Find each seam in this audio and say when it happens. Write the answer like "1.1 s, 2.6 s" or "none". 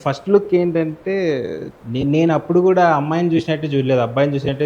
1.6 s